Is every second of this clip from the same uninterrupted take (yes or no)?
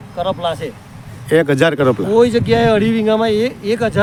yes